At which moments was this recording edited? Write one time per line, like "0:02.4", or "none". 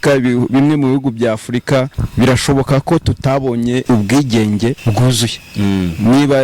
0:02.0
0:03.8
0:04.8

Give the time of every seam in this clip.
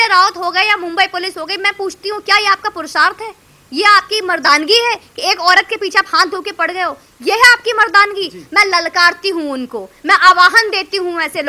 none

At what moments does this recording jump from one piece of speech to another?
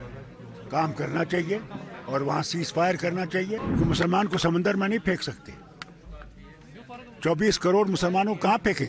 0:03.6

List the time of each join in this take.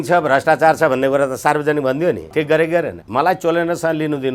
0:02.2
0:03.0

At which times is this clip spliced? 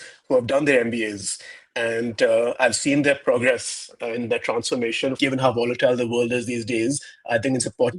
0:05.2

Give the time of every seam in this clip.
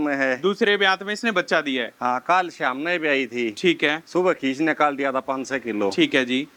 none

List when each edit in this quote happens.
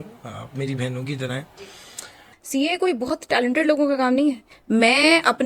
0:02.3

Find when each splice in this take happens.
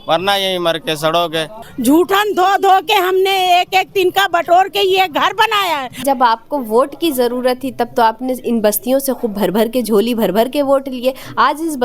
0:01.6
0:06.0

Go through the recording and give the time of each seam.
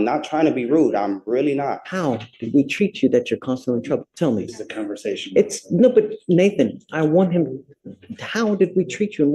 none

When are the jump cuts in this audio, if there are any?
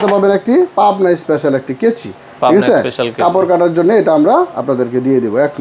none

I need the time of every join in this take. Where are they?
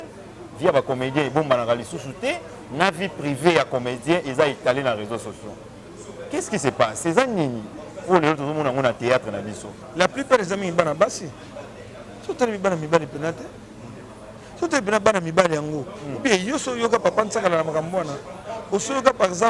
none

